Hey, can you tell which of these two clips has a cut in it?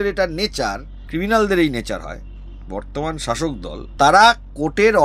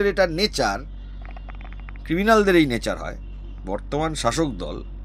first; 2 cuts; at 0.9 s, 3.9 s

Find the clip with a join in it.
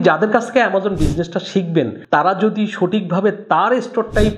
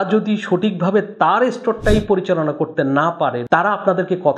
second; 1 cut; at 3.4 s

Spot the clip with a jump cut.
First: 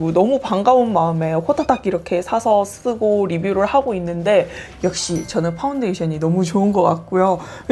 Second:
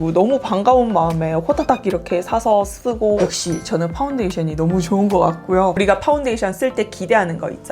second; 2 cuts; at 3.2 s, 5.8 s

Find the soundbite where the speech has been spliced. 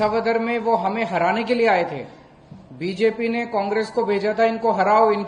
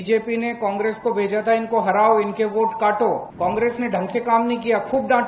second; 1 cut; at 3.3 s

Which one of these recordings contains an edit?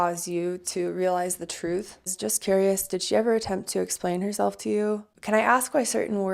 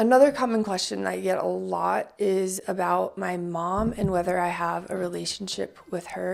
first; 2 cuts; at 2.1 s, 5.1 s

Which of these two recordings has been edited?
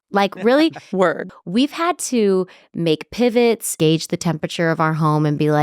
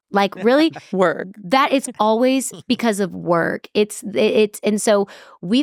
first; 2 cuts; at 1.3 s, 3.7 s

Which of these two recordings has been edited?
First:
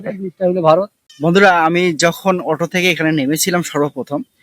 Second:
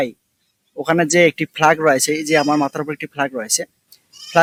first; 1 cut; at 1.0 s

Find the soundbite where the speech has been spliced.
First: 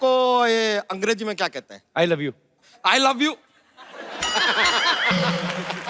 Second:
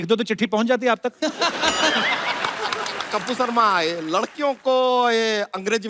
second; 1 cut; at 3.1 s

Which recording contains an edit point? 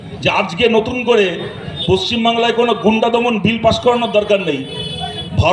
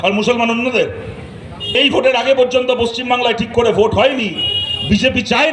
second; 1 cut; at 1.8 s

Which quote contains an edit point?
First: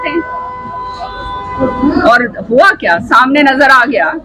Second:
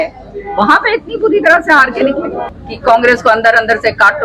second; 1 cut; at 2.5 s

